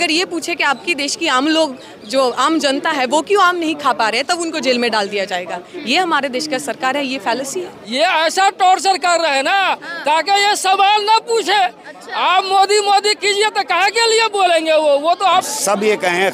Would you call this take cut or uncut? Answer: cut